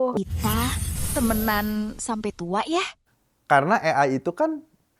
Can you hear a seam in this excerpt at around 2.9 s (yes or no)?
yes